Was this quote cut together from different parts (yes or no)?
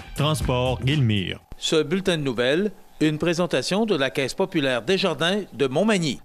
yes